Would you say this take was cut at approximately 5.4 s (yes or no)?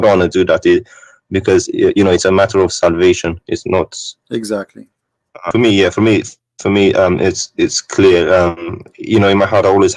yes